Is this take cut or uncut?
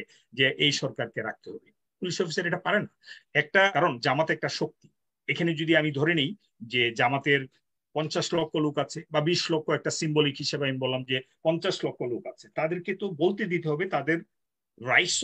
cut